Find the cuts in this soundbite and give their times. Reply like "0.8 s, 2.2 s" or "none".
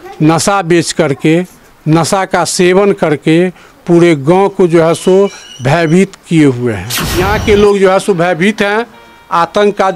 7.0 s